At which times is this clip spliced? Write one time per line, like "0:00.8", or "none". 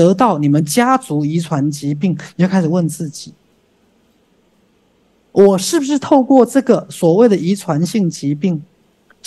none